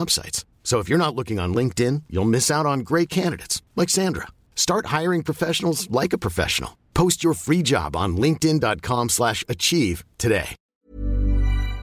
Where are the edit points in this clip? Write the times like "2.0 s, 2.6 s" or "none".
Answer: 10.6 s

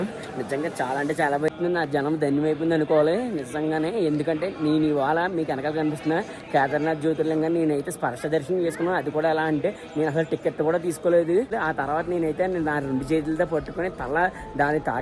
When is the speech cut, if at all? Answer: 1.5 s, 11.6 s

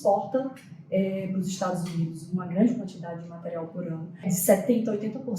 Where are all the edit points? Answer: 4.2 s

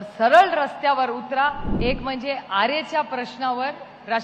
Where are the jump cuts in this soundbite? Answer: 1.7 s

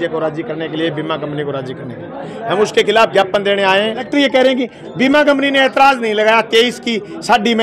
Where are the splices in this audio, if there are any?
4.1 s

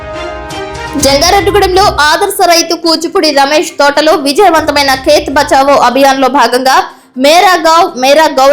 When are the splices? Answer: 0.9 s

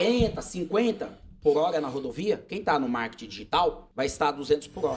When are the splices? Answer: 3.8 s

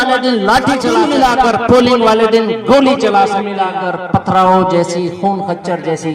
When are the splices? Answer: 1.0 s, 3.5 s

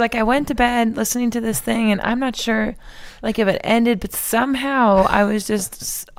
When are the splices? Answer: none

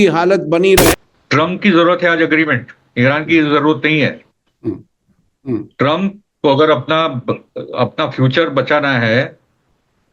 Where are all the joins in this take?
1.0 s

